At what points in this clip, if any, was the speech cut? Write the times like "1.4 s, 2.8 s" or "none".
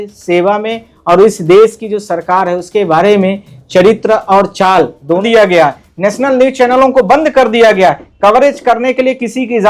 5.2 s

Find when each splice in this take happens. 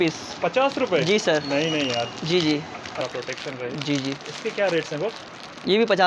3.0 s

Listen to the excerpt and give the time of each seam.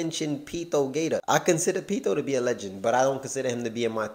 1.2 s

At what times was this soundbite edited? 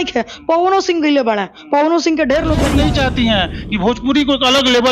2.7 s

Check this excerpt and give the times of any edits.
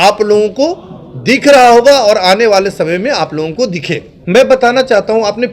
4.1 s

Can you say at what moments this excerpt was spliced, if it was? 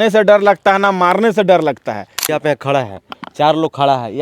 2.3 s

